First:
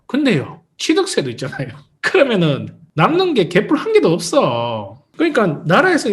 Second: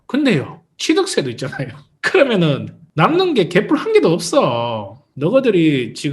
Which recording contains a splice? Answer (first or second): second